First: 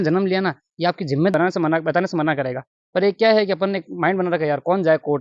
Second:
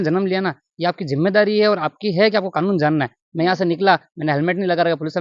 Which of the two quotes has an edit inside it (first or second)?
first